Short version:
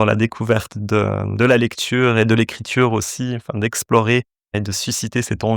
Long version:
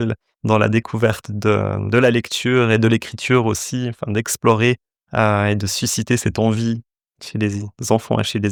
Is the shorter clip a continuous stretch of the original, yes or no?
no